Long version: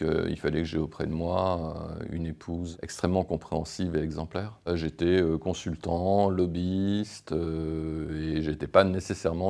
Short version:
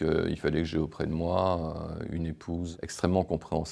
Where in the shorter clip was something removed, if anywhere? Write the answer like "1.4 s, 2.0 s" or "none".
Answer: none